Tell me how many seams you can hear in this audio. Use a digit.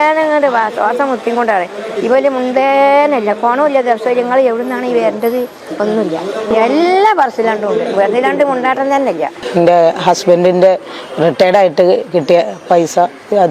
0